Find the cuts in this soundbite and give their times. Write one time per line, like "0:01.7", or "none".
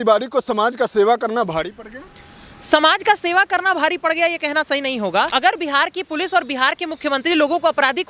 0:05.3